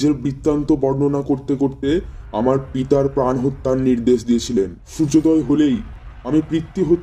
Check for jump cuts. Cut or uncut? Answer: cut